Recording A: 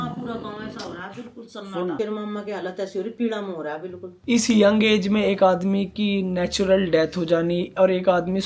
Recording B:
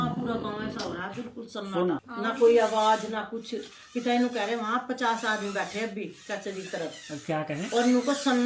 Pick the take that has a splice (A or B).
A